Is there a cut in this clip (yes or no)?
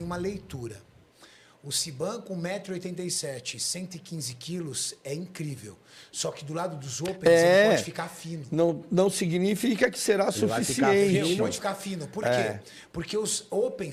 no